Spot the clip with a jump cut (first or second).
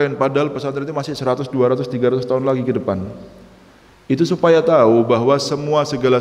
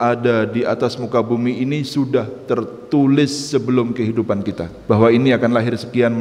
second